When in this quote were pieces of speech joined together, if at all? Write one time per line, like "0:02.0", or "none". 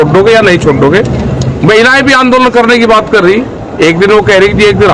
none